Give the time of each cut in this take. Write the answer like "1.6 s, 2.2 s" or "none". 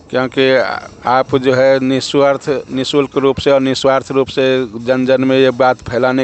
none

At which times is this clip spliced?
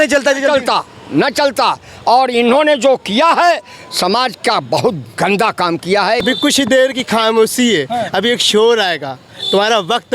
6.2 s

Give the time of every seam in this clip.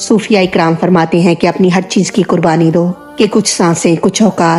none

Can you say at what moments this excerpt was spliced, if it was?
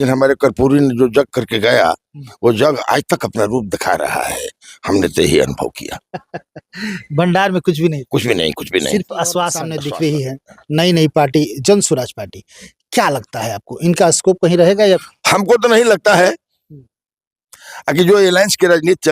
9.7 s, 15.0 s

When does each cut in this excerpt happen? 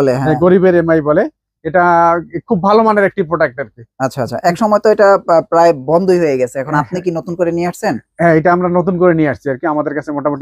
none

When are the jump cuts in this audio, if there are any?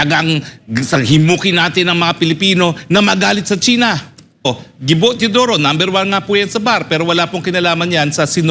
4.5 s

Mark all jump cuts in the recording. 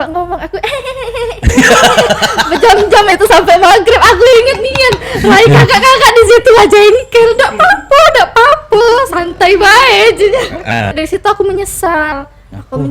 10.9 s

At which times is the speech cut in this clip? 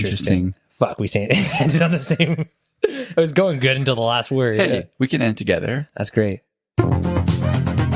6.5 s

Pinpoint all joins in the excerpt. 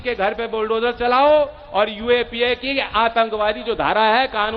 none

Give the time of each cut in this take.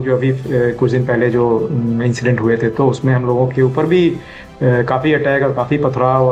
none

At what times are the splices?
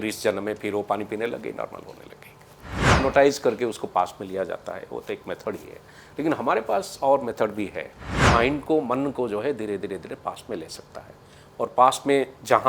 2.9 s, 8.2 s

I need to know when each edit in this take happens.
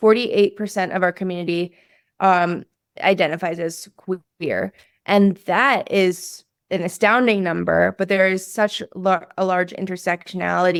none

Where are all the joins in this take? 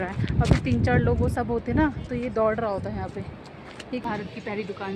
4.0 s

